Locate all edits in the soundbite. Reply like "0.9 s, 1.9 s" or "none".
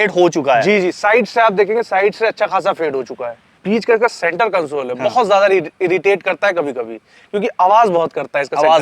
3.5 s